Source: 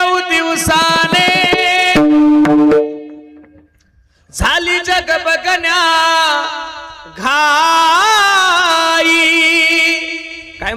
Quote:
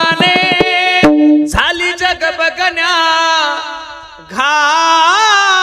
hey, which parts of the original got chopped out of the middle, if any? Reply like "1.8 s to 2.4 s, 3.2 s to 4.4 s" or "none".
2.4 s to 4.3 s